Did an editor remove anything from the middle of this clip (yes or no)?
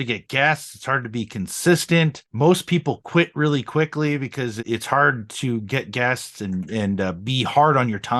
yes